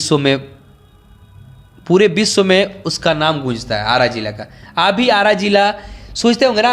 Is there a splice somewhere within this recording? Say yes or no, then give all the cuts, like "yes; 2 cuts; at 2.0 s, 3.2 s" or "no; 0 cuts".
no; 0 cuts